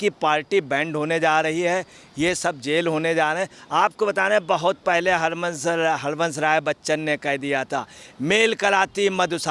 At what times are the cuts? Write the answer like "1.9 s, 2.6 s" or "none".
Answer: none